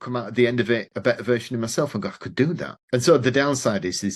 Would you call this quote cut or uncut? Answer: cut